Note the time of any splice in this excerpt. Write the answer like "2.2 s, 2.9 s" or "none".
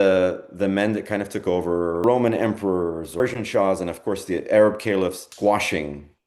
2.0 s, 3.2 s, 5.3 s